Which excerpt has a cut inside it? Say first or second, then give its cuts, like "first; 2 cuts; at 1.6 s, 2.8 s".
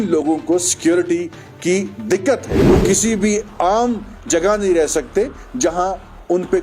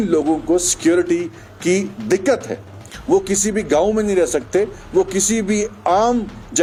first; 1 cut; at 2.5 s